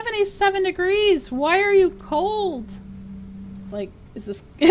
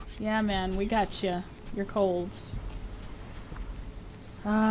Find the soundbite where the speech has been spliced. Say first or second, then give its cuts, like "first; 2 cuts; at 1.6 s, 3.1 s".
first; 1 cut; at 3.7 s